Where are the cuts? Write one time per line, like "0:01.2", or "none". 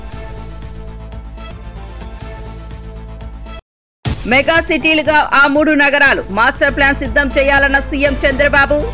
0:01.5
0:03.6